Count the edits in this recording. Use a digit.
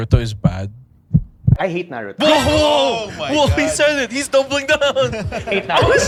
0